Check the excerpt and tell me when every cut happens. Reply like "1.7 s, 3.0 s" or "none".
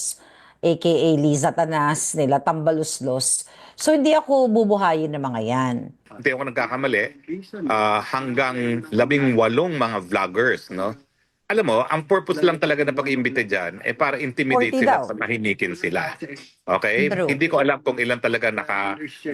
6.0 s